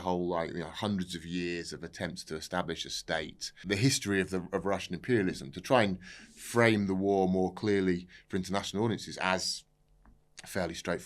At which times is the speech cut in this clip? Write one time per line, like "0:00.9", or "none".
0:03.6